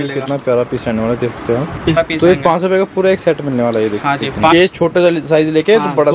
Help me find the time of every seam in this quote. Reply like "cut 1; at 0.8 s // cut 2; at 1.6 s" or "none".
cut 1; at 2.0 s // cut 2; at 4.5 s